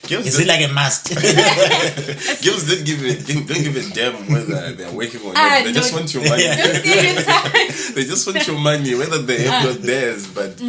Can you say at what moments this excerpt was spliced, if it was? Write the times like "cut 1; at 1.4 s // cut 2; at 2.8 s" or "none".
none